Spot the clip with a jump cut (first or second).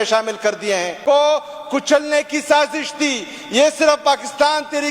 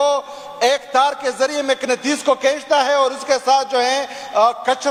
first